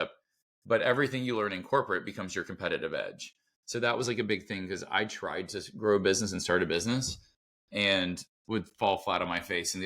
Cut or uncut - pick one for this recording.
uncut